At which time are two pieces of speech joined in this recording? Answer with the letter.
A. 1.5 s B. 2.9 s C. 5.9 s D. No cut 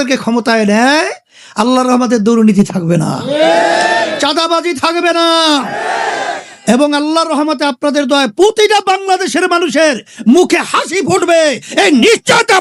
D